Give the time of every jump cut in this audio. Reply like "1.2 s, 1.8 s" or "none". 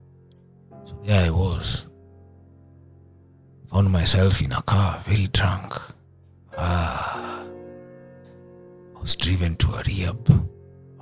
1.0 s